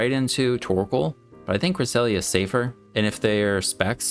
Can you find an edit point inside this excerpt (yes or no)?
yes